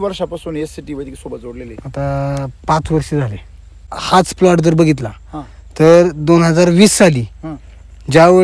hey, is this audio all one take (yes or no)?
no